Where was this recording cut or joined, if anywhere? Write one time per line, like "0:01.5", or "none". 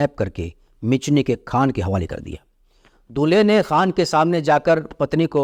none